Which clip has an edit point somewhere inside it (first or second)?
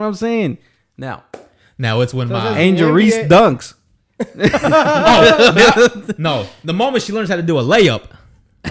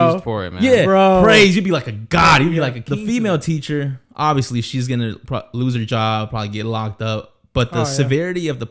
second